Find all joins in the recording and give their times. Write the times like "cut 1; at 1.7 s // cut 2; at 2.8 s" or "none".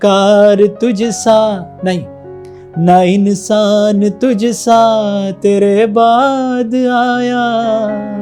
none

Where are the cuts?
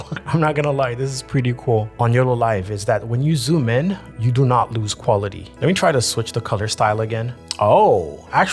cut 1; at 1.9 s // cut 2; at 5.4 s

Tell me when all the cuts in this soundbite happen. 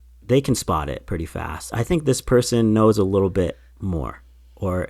cut 1; at 1.7 s

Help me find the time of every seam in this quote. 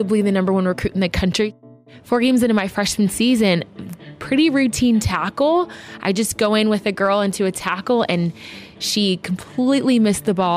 cut 1; at 1.5 s

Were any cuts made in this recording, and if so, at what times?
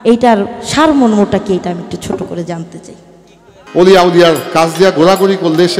cut 1; at 3.6 s

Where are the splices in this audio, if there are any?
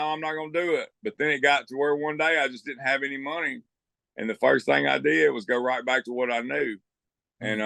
none

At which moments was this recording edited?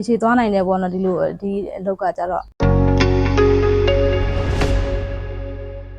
cut 1; at 2.5 s

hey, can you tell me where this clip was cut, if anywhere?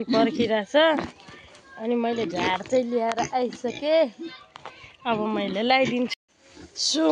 none

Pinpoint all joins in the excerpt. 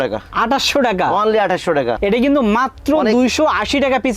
cut 1; at 2.0 s

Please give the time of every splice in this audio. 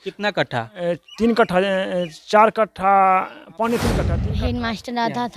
cut 1; at 4.2 s

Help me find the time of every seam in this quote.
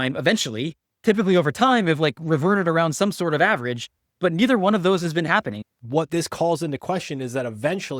cut 1; at 5.6 s

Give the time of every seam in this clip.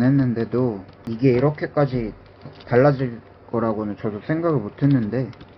cut 1; at 1.1 s

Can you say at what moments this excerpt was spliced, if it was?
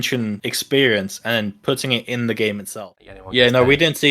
cut 1; at 2.7 s

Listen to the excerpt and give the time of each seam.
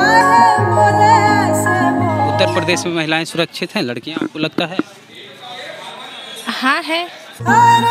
cut 1; at 2.3 s

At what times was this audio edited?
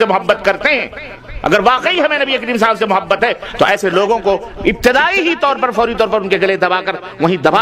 none

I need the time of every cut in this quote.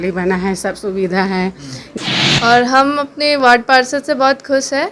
cut 1; at 1.9 s

